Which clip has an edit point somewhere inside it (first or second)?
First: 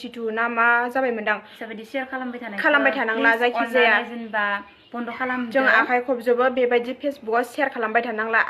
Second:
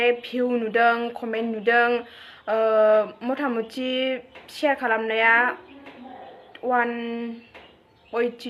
first